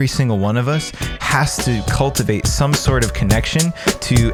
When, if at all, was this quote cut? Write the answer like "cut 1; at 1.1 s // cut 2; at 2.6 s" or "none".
none